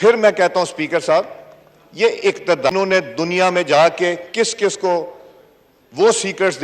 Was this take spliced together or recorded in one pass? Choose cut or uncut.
cut